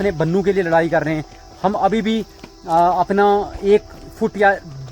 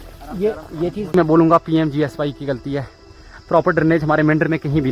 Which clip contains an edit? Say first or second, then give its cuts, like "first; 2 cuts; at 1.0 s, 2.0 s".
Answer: second; 1 cut; at 1.1 s